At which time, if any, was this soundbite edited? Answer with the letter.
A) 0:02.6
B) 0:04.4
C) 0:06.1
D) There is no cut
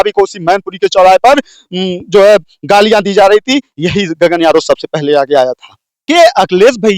C